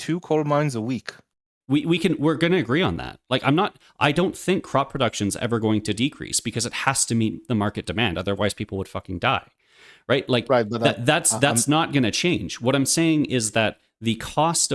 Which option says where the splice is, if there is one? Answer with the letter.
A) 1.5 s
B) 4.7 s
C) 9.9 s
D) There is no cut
A